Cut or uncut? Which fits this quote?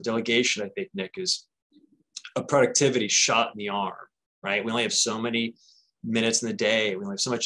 uncut